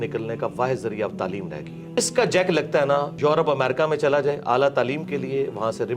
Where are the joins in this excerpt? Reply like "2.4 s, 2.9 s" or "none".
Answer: 2.0 s, 3.1 s

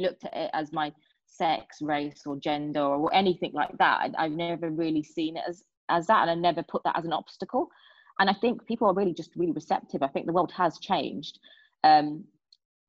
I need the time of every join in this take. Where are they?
none

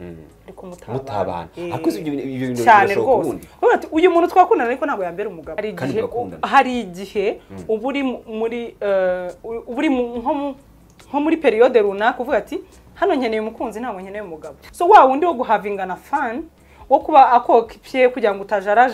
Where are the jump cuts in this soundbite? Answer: 5.5 s, 14.6 s

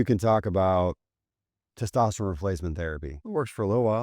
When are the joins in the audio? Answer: 3.1 s

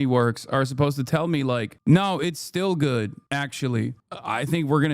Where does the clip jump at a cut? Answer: 1.7 s, 3.2 s, 4.1 s

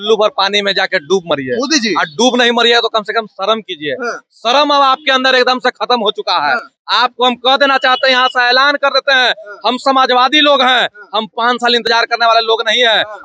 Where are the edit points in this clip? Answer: none

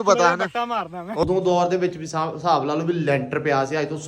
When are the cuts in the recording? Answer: 1.2 s

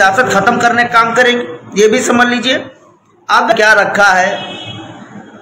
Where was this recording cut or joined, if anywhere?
3.5 s

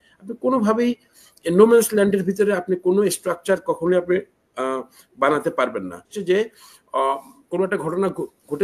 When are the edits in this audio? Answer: 6.2 s

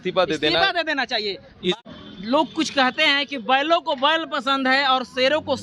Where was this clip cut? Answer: 1.7 s

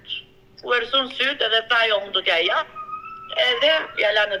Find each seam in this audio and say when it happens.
none

